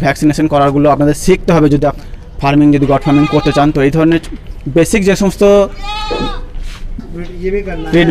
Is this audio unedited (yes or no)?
no